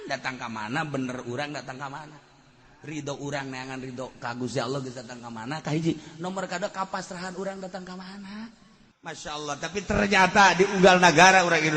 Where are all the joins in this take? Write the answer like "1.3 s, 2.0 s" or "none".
9.2 s